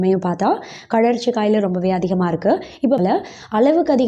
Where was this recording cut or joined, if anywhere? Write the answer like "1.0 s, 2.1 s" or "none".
3.0 s